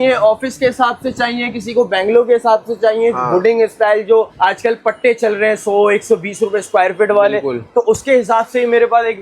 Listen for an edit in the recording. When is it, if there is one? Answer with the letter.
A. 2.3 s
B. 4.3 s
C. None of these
B